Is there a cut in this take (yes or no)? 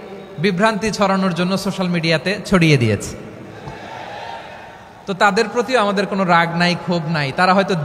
no